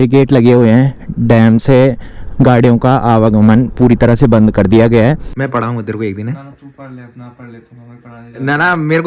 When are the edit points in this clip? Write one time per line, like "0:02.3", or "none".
0:05.3